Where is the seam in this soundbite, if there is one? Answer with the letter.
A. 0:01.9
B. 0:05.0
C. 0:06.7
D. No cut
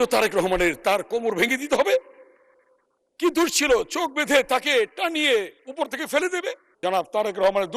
C